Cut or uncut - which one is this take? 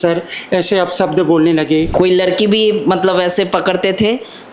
cut